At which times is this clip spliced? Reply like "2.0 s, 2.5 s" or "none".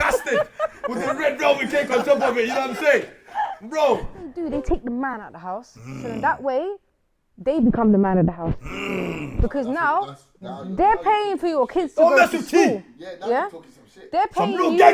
4.4 s